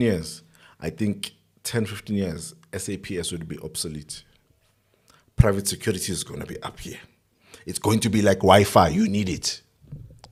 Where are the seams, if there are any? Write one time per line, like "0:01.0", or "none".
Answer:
none